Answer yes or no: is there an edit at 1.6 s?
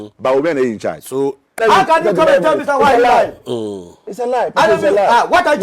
yes